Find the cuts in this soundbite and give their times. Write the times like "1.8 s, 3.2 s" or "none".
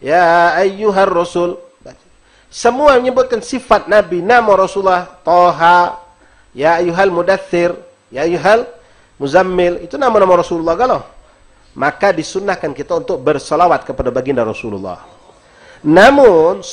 none